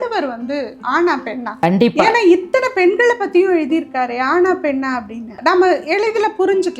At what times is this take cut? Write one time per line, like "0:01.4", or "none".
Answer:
0:01.6
0:05.4